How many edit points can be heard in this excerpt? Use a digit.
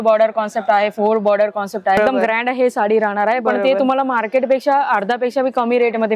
1